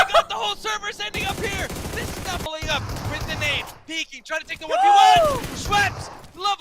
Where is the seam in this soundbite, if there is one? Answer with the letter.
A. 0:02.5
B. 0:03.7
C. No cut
A